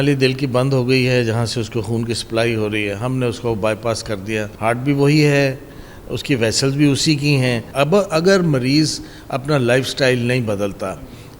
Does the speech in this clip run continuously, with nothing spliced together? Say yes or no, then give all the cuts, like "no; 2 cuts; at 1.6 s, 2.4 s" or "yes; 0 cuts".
no; 2 cuts; at 4.5 s, 7.7 s